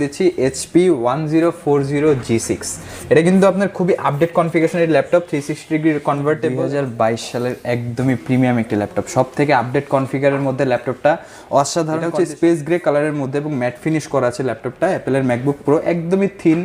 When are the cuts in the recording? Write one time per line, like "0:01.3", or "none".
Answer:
0:06.6
0:12.0